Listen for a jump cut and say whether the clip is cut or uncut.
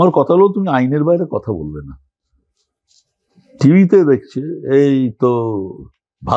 uncut